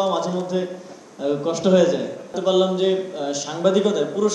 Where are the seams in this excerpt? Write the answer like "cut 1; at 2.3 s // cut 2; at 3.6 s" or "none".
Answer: cut 1; at 2.4 s